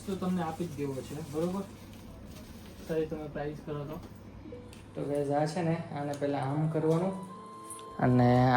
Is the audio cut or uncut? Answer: cut